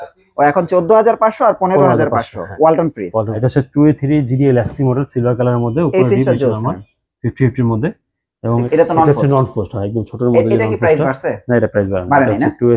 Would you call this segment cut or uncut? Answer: cut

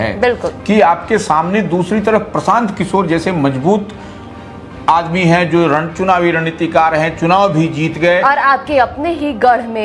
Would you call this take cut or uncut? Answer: uncut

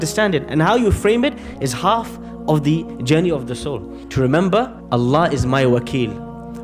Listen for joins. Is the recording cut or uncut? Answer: cut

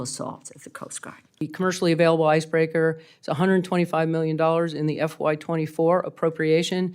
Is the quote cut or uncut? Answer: cut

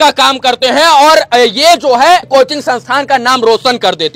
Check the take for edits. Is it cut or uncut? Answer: cut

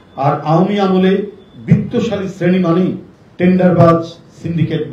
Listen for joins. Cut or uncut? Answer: uncut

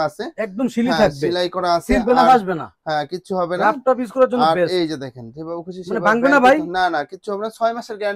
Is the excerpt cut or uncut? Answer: uncut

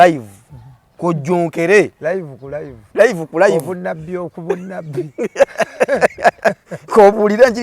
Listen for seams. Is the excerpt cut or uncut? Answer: uncut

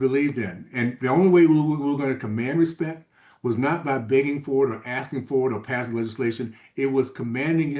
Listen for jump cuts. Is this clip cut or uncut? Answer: uncut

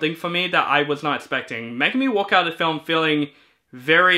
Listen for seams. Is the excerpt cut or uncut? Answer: uncut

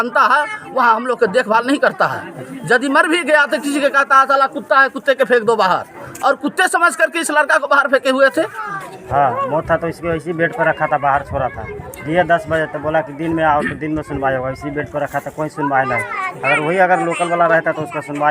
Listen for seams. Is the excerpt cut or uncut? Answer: cut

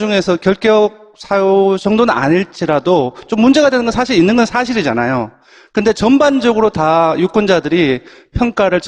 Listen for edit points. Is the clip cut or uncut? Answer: cut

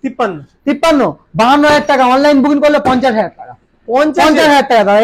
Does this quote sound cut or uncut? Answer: uncut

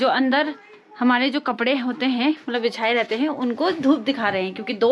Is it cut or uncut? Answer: uncut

